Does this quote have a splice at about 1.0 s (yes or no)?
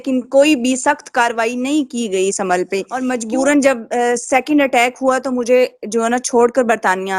no